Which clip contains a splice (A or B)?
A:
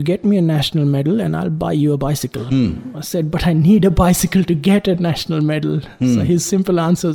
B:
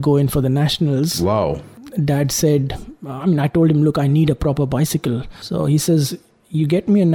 B